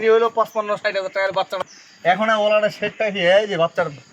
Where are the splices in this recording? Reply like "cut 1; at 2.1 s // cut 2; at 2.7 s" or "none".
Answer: cut 1; at 1.6 s